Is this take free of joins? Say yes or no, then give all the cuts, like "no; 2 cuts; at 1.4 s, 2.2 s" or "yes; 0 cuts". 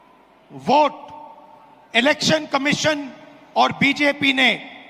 yes; 0 cuts